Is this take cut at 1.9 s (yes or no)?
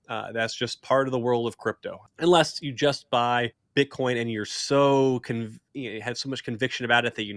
yes